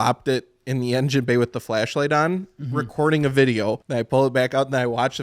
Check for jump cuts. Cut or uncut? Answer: cut